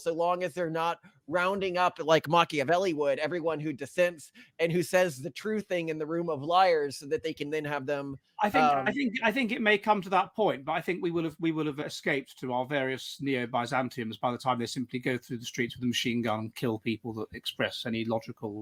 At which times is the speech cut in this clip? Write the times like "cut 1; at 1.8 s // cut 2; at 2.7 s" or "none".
none

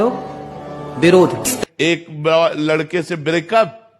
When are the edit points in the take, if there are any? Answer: cut 1; at 1.5 s

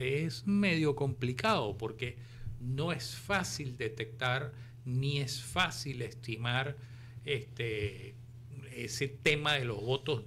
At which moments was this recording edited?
none

